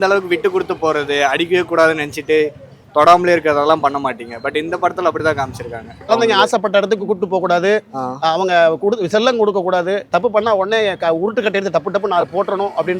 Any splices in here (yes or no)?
yes